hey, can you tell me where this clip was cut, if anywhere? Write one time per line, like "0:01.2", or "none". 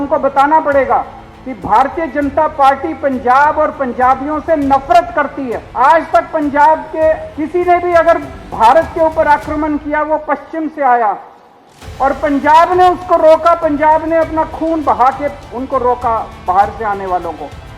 0:05.6
0:07.3